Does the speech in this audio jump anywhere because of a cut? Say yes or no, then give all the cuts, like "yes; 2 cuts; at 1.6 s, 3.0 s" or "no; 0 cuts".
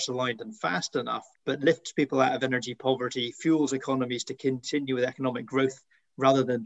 yes; 1 cut; at 1.3 s